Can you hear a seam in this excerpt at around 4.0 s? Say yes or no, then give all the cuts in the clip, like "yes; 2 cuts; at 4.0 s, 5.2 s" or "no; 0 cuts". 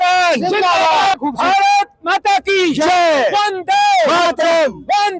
no; 1 cut; at 1.2 s